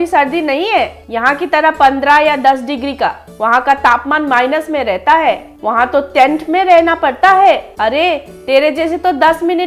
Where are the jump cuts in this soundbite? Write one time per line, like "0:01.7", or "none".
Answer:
none